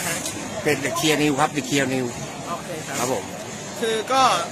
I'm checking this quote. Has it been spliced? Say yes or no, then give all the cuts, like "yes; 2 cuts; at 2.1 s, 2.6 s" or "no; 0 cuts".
no; 0 cuts